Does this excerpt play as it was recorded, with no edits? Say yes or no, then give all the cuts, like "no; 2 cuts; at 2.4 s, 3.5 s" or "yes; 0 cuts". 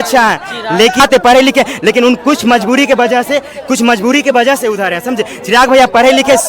no; 1 cut; at 1.0 s